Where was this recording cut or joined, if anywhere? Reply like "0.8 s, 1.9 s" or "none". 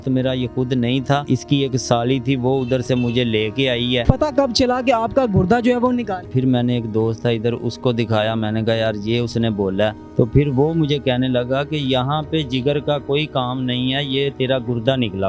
1.2 s, 4.0 s, 6.3 s, 10.0 s